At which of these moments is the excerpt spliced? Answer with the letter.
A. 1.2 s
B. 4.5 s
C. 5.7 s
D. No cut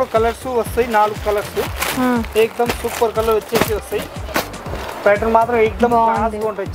B